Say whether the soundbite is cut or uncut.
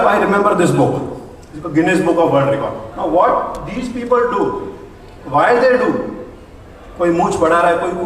cut